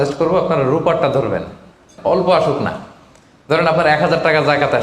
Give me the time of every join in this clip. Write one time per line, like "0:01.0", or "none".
0:01.9